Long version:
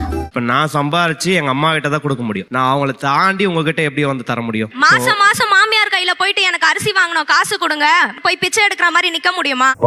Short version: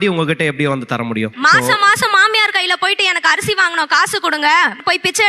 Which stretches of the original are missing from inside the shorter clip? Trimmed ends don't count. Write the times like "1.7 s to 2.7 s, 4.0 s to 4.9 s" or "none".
none